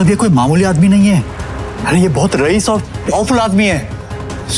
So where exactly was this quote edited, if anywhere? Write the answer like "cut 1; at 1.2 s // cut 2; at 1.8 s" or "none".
none